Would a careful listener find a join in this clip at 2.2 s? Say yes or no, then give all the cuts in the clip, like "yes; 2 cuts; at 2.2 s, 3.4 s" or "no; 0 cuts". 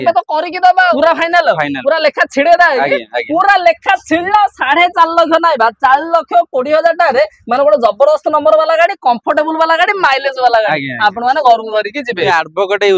no; 2 cuts; at 0.9 s, 12.3 s